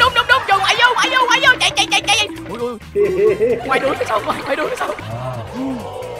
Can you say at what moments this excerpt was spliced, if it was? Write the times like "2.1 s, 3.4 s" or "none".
3.7 s, 5.1 s